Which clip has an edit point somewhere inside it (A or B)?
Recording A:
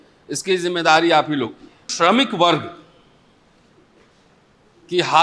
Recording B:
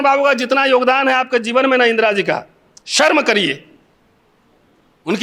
A